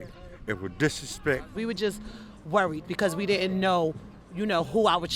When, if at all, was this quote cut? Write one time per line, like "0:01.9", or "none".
0:01.5